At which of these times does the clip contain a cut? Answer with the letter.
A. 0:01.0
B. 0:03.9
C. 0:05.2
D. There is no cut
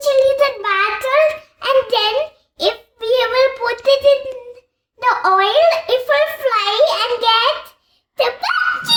D